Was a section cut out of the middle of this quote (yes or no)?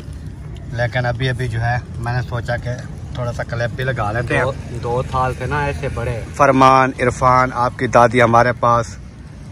yes